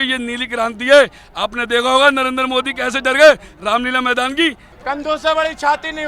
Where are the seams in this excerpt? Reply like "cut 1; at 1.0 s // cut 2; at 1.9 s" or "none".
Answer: cut 1; at 4.7 s